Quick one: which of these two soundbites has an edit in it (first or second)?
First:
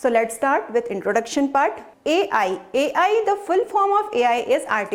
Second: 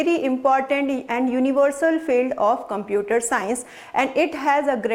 first